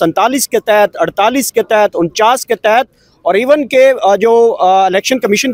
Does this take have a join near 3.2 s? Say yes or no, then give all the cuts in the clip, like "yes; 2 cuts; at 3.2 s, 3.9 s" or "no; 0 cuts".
no; 0 cuts